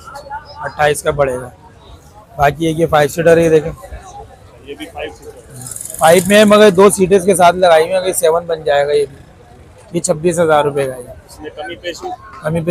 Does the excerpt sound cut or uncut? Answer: uncut